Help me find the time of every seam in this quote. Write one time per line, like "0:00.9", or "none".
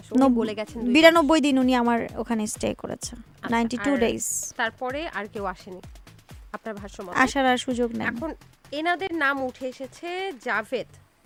none